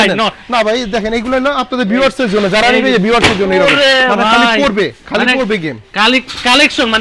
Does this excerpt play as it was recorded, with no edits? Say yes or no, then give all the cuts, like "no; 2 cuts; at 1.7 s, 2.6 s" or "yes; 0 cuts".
yes; 0 cuts